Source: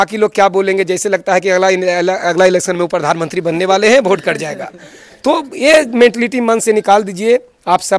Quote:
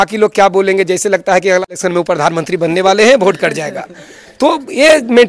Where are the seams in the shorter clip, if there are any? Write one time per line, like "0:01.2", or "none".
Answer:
0:01.7